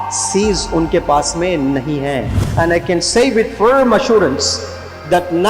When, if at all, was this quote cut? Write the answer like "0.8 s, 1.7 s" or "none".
2.4 s